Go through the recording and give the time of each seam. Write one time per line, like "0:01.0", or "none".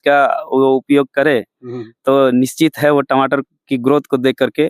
none